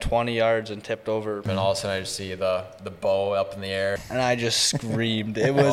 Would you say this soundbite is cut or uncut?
cut